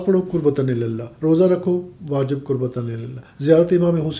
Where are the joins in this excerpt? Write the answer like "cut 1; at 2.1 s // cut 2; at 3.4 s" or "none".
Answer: none

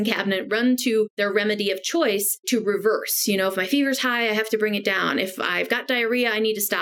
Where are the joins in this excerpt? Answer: cut 1; at 1.1 s // cut 2; at 2.4 s

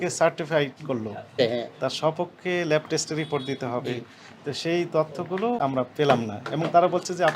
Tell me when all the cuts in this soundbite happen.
cut 1; at 1.4 s // cut 2; at 5.6 s

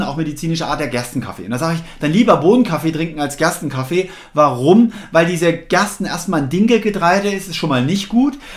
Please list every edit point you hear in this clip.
none

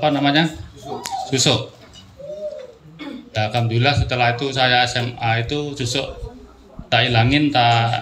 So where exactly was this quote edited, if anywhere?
none

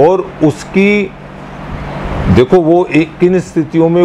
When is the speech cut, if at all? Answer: none

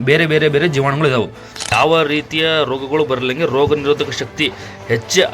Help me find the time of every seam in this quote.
cut 1; at 1.5 s

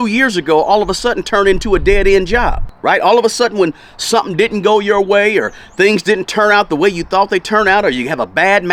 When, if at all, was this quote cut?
none

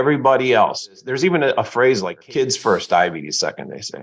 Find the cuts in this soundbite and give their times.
cut 1; at 1.0 s // cut 2; at 2.1 s

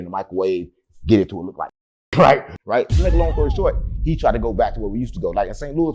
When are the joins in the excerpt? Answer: cut 1; at 2.5 s

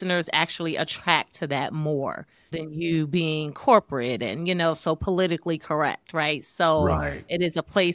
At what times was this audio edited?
cut 1; at 2.5 s

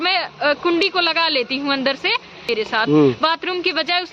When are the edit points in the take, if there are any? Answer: cut 1; at 2.5 s

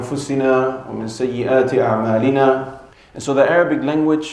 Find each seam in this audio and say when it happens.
cut 1; at 2.8 s

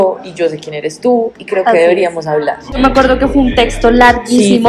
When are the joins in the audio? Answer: none

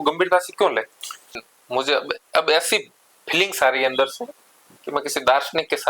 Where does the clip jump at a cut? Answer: cut 1; at 1.5 s

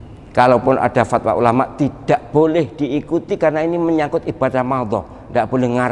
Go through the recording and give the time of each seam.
none

